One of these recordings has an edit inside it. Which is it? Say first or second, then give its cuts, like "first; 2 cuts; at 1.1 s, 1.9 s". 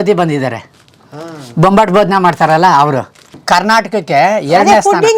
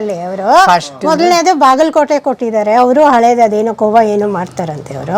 first; 1 cut; at 3.3 s